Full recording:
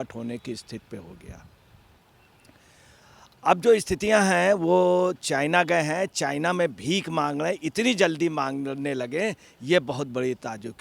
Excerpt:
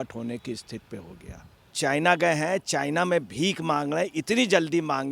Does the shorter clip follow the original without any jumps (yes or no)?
no